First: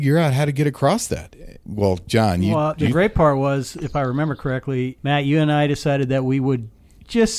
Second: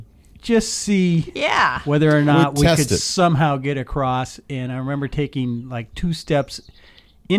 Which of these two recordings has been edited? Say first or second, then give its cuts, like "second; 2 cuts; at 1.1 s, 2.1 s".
first; 3 cuts; at 1.6 s, 2.5 s, 5.0 s